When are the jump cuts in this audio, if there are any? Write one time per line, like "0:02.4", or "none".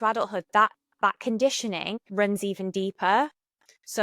0:02.0